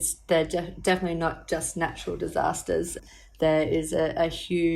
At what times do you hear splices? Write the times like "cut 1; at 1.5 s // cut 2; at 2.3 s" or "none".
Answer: cut 1; at 2.9 s